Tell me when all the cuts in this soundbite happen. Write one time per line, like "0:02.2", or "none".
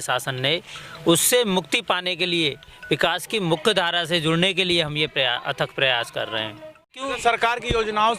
0:07.0